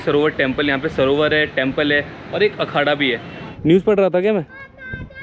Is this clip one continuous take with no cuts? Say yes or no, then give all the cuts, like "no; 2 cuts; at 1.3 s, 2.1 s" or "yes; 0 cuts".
no; 1 cut; at 3.4 s